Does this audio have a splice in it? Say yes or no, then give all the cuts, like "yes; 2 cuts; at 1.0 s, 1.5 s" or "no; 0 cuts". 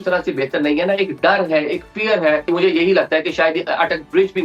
yes; 1 cut; at 2.5 s